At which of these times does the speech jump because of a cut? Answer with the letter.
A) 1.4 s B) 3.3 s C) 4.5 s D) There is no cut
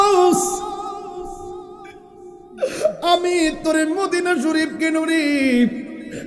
D